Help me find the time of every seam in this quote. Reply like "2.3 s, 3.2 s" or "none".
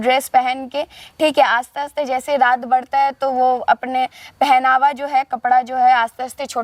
none